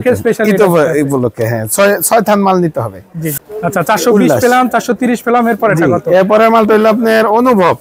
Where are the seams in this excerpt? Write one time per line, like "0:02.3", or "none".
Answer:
0:03.4